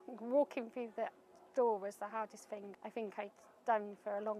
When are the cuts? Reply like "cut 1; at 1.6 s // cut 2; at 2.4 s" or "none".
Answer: cut 1; at 2.7 s